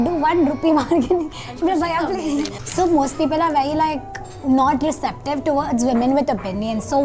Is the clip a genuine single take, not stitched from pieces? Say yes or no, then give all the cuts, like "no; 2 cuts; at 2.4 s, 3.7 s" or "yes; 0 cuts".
no; 1 cut; at 2.6 s